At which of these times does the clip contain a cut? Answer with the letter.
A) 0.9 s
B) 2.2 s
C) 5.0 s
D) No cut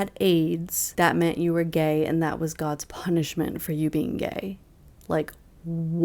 D